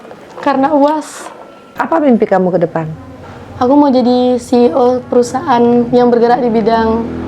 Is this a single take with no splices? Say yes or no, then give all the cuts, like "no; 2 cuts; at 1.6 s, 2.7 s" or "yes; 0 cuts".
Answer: no; 1 cut; at 1.8 s